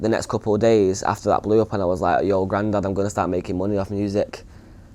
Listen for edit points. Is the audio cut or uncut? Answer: uncut